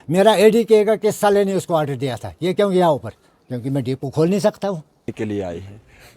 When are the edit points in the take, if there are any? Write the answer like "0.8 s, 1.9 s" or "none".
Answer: 5.2 s

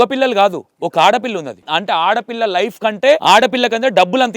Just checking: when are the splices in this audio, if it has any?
1.7 s, 3.2 s

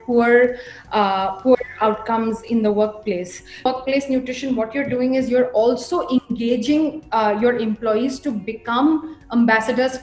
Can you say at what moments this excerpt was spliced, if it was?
3.7 s

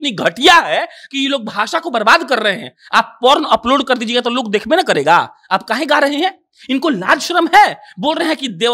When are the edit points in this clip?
none

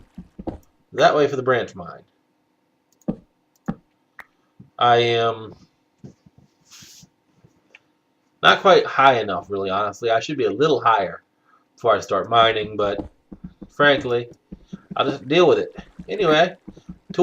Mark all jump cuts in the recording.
8.4 s

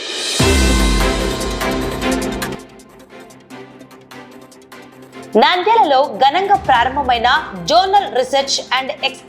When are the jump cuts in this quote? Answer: 2.6 s, 4.9 s

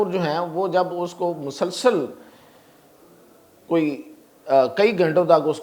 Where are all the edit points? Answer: none

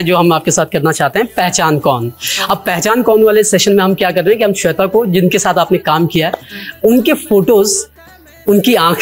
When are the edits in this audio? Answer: none

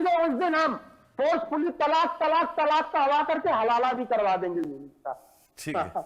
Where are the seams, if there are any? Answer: none

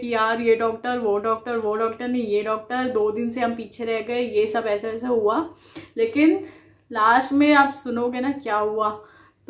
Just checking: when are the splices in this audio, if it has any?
none

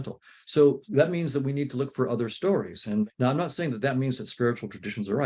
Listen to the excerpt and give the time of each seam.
3.1 s

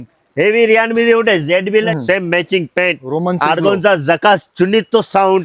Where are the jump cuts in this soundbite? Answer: 1.9 s

